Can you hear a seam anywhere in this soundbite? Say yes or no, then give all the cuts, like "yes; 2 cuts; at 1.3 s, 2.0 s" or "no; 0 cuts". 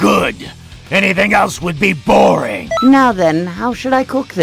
yes; 1 cut; at 2.6 s